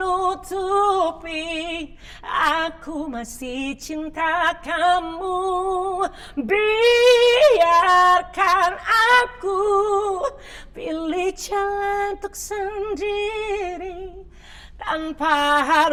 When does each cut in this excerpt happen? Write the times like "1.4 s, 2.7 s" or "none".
none